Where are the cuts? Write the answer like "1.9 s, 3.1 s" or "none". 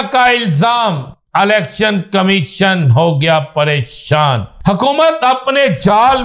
4.5 s